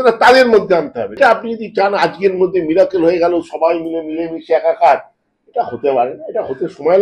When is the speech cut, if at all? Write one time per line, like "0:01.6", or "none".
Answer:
0:01.2